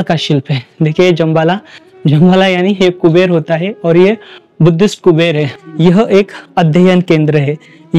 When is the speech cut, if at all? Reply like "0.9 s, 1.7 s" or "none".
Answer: 5.5 s